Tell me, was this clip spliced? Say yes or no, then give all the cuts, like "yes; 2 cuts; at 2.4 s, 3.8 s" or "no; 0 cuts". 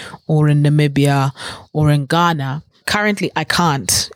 yes; 1 cut; at 2.8 s